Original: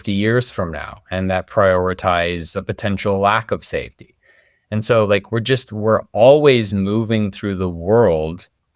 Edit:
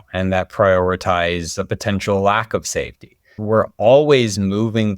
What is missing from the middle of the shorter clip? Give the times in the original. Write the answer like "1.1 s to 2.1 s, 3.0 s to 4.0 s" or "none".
4.3 s to 5.7 s